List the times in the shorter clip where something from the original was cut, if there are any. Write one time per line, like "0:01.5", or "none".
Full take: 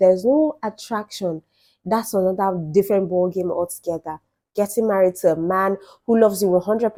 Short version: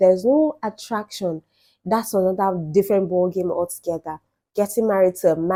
none